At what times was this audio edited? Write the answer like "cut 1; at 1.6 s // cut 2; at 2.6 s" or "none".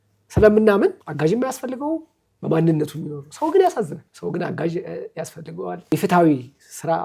cut 1; at 1.0 s // cut 2; at 4.0 s // cut 3; at 5.9 s

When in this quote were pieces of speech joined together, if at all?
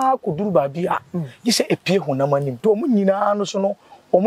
cut 1; at 2.6 s

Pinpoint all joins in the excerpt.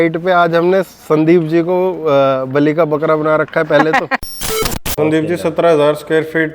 cut 1; at 4.4 s

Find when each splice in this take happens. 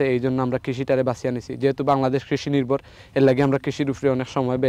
none

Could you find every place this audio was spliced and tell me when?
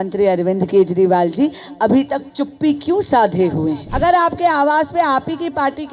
cut 1; at 3.8 s

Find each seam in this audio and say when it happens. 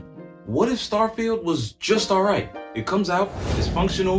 none

